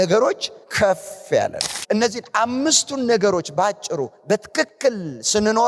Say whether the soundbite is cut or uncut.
cut